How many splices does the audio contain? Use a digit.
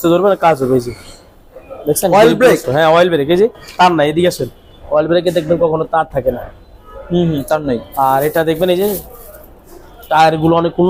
0